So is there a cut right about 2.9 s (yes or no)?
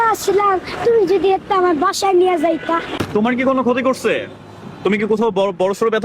yes